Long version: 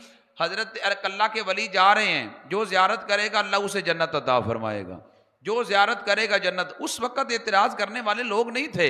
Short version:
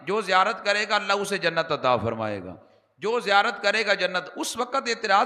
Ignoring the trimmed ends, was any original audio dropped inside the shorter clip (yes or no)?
no